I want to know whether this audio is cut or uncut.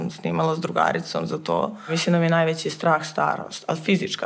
cut